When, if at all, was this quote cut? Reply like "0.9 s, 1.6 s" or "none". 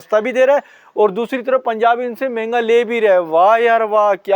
none